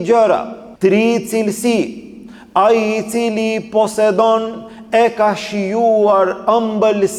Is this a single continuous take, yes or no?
yes